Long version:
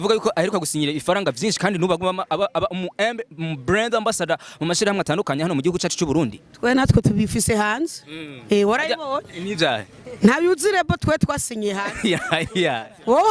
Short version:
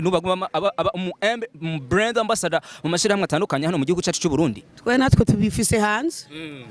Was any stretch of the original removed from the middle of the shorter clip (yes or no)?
no